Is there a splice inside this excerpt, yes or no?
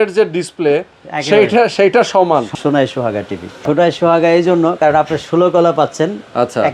yes